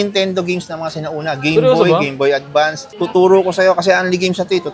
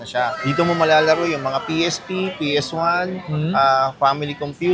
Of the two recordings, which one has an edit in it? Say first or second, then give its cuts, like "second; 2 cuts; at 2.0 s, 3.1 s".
first; 1 cut; at 2.9 s